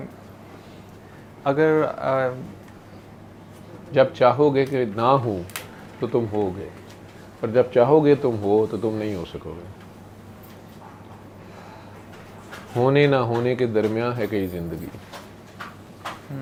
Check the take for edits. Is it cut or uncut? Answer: uncut